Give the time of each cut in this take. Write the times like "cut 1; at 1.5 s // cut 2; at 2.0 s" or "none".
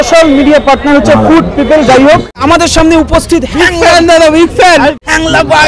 none